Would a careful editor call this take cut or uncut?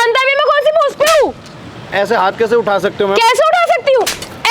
cut